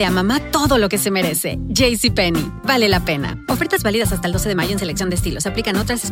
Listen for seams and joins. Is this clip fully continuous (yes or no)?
yes